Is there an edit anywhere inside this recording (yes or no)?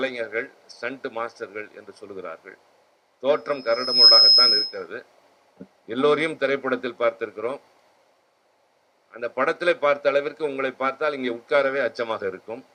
no